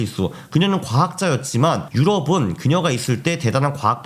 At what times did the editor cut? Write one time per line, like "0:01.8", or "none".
0:01.9